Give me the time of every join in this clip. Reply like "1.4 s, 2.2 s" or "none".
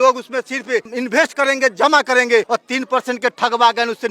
0.9 s, 2.5 s